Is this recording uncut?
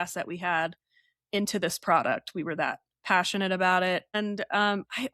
no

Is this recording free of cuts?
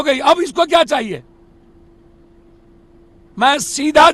yes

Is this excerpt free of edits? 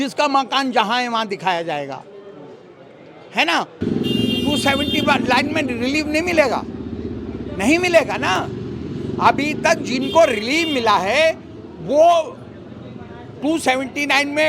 no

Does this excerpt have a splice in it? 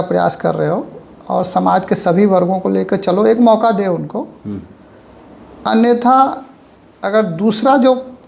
no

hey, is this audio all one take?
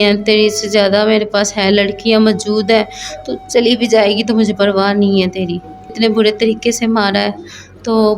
no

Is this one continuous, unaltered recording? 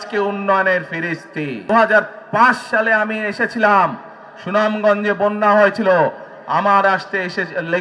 no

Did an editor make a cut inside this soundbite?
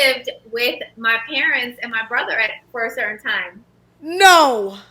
no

